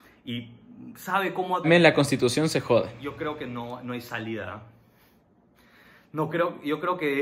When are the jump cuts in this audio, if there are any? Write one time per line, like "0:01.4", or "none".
0:01.7